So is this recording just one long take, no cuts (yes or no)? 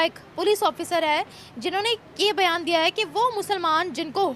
yes